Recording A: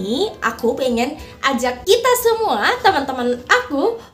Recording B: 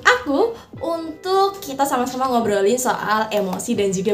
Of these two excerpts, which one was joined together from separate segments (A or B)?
A